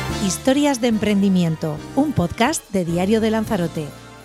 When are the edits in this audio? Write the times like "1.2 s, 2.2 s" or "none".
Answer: none